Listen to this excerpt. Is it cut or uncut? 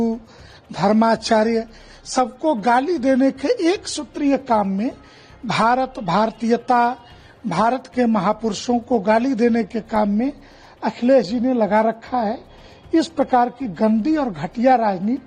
uncut